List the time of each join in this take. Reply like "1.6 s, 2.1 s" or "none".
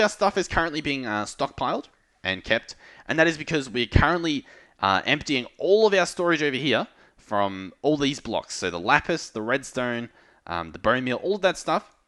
none